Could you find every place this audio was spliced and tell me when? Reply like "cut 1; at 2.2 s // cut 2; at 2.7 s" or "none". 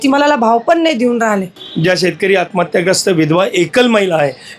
cut 1; at 1.6 s